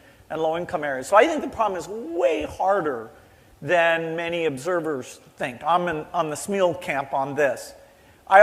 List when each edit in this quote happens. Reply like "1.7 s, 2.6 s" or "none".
6.8 s

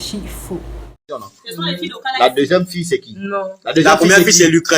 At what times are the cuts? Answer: 0.9 s

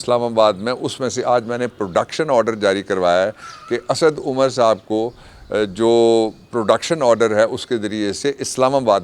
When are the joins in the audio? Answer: none

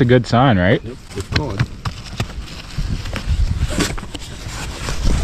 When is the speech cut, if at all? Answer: none

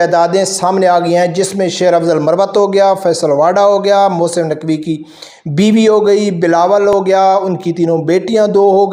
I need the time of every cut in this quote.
none

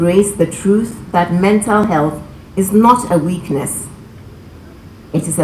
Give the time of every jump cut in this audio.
none

